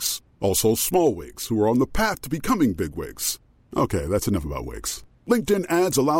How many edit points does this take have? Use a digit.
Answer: 0